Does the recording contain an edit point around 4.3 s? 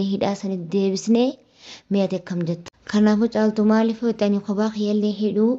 no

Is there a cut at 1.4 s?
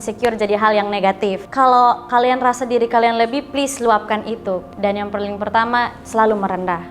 yes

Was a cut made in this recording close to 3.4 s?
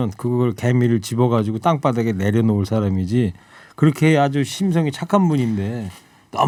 no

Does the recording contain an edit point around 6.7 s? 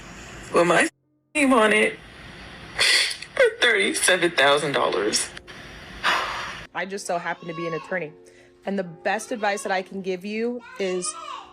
yes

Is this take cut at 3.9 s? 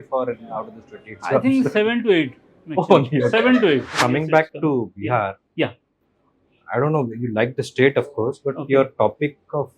yes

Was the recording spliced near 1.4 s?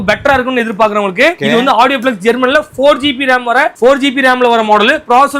yes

